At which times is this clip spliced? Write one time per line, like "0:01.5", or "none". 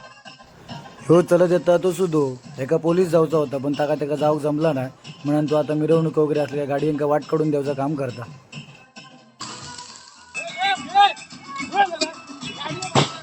none